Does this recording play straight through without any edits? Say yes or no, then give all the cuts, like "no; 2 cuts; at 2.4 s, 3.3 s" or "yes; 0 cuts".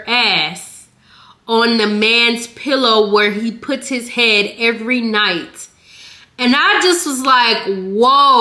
yes; 0 cuts